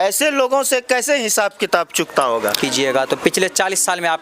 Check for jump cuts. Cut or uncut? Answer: cut